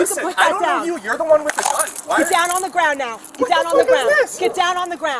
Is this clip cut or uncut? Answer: uncut